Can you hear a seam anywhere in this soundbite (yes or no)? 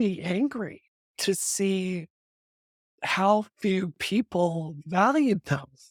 no